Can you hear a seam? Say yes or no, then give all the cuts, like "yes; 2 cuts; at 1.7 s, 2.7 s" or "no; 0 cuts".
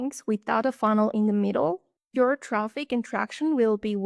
no; 0 cuts